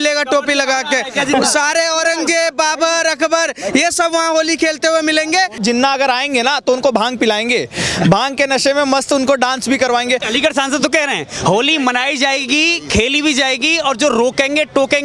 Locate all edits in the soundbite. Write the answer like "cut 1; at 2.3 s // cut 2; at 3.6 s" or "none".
cut 1; at 5.6 s // cut 2; at 10.3 s